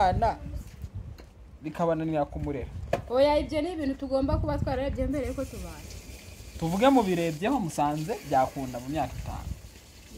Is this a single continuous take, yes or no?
yes